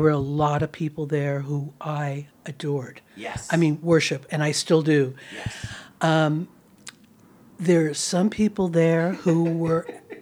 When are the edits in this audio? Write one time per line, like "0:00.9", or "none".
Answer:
none